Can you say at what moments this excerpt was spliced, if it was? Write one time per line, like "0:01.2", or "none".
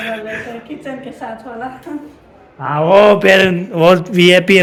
none